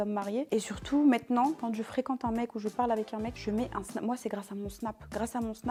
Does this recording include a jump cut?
no; 0 cuts

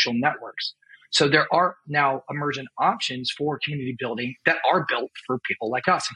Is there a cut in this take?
no; 0 cuts

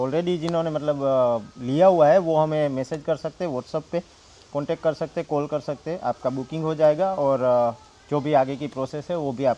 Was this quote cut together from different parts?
no; 0 cuts

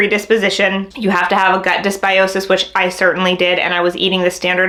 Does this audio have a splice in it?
no; 0 cuts

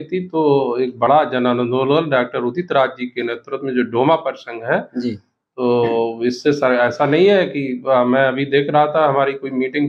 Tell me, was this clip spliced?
no; 0 cuts

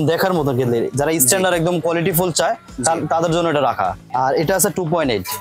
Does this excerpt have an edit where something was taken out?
yes; 1 cut; at 4.0 s

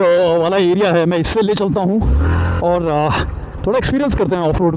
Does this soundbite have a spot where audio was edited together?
no; 0 cuts

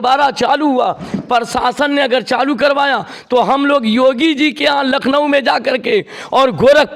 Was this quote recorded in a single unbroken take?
yes; 0 cuts

